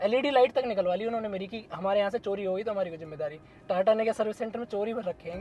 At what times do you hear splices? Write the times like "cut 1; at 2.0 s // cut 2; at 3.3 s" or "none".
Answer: none